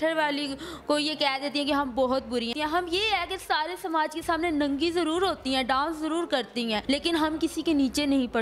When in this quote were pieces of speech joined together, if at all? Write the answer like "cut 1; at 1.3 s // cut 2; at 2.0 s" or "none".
cut 1; at 2.5 s // cut 2; at 6.8 s